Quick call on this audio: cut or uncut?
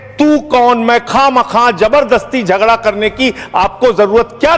uncut